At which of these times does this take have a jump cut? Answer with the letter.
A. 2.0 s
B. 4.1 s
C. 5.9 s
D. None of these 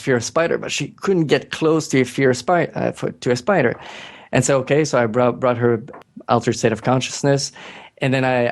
C